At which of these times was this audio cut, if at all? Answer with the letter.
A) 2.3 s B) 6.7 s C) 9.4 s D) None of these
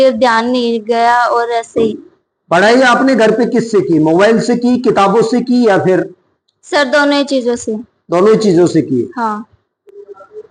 D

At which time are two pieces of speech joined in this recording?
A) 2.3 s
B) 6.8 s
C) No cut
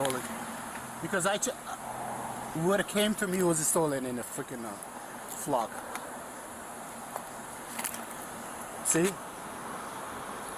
C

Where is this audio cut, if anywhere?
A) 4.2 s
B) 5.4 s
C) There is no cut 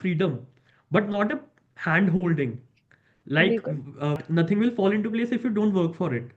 A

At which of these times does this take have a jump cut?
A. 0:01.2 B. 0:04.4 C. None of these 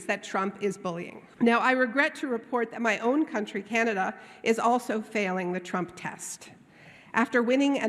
A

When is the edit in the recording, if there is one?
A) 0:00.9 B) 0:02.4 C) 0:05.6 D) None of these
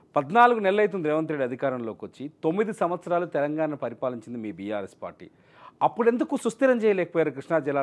D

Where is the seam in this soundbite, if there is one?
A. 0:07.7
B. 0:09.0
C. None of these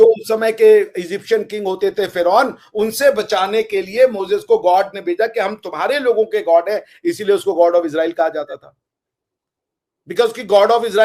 C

